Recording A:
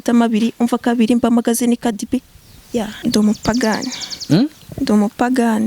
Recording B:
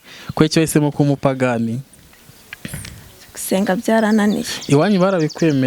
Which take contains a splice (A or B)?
A